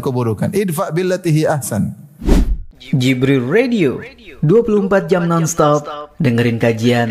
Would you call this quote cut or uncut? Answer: cut